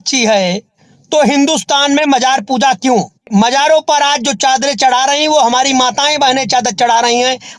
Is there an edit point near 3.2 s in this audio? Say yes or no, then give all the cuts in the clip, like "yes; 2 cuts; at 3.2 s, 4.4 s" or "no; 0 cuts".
yes; 1 cut; at 3.2 s